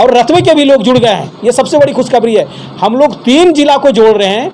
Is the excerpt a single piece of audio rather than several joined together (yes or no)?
yes